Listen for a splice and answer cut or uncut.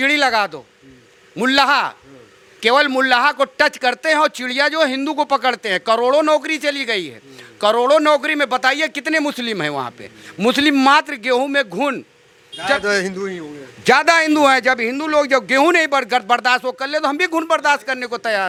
uncut